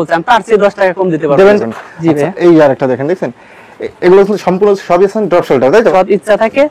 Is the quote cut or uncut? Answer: cut